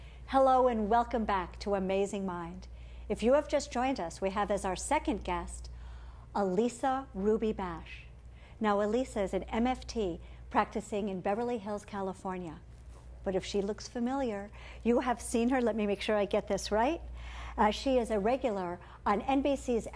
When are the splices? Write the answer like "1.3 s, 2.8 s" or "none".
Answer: 6.8 s